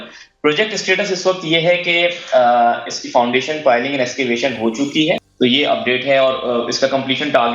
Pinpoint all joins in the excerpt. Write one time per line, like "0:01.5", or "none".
0:05.3